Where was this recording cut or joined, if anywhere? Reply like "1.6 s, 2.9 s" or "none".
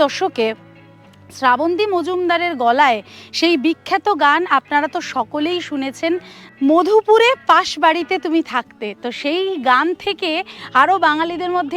none